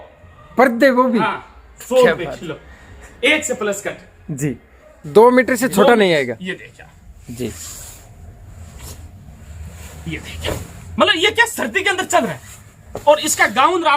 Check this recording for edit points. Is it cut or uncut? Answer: cut